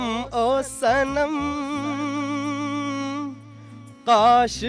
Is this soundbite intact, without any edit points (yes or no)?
yes